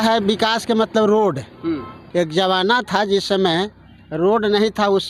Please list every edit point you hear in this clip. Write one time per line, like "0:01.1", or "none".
none